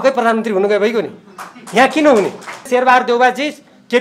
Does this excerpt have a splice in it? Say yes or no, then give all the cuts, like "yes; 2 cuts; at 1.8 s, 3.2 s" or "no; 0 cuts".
yes; 1 cut; at 2.7 s